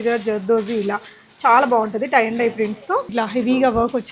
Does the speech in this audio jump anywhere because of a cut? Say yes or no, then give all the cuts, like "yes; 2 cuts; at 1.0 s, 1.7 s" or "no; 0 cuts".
yes; 1 cut; at 3.1 s